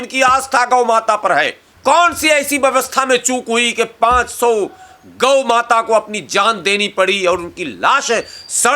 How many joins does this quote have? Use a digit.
1